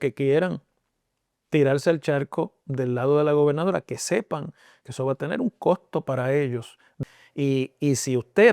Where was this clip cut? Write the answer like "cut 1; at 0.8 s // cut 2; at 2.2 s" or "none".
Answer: cut 1; at 7.0 s